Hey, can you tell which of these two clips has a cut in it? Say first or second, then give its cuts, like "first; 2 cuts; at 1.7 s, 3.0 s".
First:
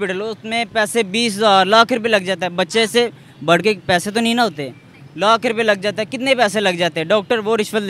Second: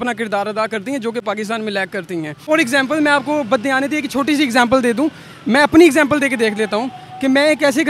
second; 1 cut; at 2.4 s